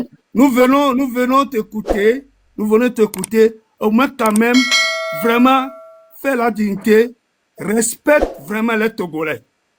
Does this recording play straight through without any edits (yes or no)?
yes